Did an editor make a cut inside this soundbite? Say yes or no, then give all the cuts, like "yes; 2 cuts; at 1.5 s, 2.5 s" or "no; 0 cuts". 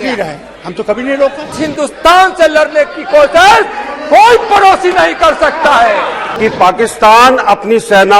yes; 2 cuts; at 1.6 s, 6.2 s